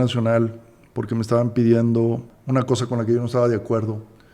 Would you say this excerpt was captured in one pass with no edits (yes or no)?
no